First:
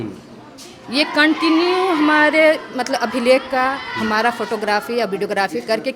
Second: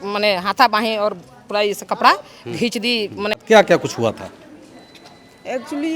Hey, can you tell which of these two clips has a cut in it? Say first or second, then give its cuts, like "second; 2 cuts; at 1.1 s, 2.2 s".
second; 1 cut; at 3.4 s